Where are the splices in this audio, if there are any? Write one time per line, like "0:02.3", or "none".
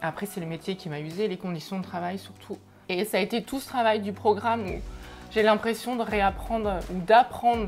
0:02.8